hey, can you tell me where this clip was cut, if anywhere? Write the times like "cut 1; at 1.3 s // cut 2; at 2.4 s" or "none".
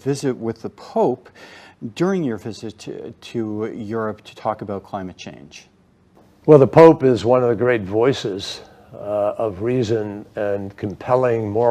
none